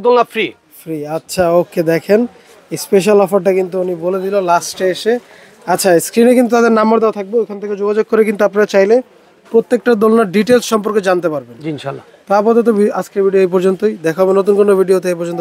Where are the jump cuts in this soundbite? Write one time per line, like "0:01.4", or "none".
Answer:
none